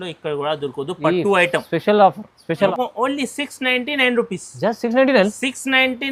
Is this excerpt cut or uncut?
cut